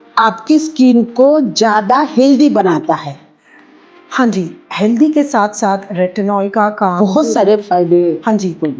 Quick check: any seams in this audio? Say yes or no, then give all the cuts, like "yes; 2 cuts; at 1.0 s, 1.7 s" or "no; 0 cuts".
no; 0 cuts